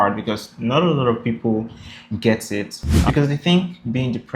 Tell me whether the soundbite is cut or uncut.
cut